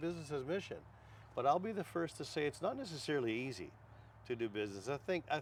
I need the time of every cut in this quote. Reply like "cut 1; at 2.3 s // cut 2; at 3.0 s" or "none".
none

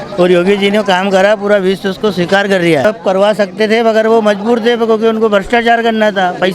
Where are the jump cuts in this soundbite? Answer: cut 1; at 3.0 s

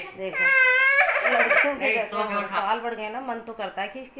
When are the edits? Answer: cut 1; at 2.6 s

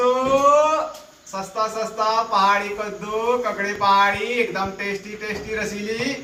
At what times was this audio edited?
none

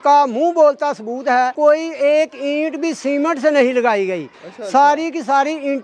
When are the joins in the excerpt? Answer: cut 1; at 1.5 s

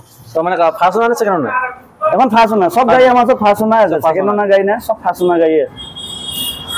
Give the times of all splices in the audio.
none

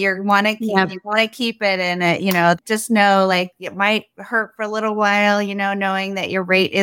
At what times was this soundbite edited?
cut 1; at 2.6 s

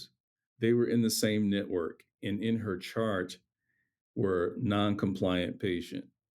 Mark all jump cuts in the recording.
none

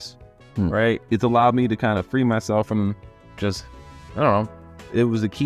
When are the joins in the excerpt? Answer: cut 1; at 1.0 s

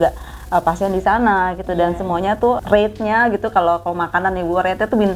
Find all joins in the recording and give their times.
cut 1; at 2.6 s

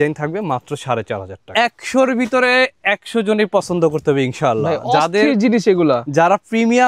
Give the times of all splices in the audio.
cut 1; at 1.4 s

